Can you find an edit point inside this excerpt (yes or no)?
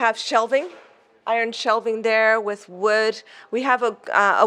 no